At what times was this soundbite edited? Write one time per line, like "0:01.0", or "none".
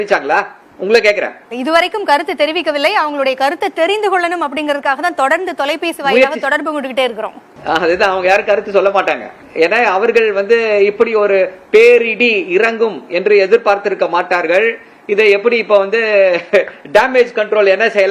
none